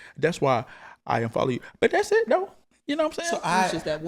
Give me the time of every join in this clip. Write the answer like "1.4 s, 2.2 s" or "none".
none